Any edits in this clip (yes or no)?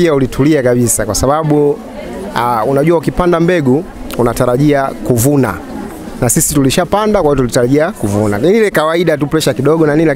no